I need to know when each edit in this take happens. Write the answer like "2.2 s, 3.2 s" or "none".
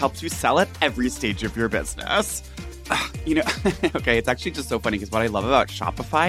2.5 s